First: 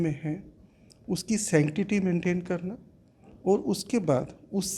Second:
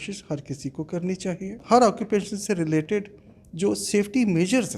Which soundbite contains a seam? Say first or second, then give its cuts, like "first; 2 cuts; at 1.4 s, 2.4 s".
second; 1 cut; at 1.6 s